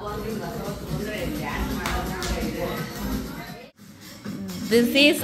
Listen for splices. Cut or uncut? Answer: cut